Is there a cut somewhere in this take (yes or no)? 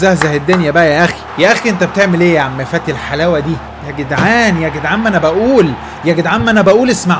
yes